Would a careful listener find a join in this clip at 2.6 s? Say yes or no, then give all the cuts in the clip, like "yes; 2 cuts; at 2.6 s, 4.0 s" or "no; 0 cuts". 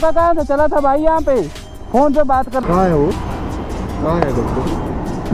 yes; 1 cut; at 2.6 s